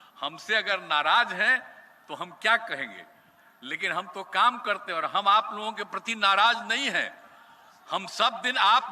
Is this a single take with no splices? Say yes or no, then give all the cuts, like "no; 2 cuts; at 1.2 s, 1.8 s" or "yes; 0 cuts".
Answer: yes; 0 cuts